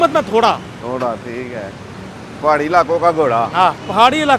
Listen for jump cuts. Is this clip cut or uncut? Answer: uncut